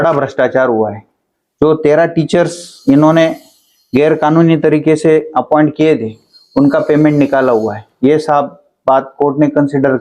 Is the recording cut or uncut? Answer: uncut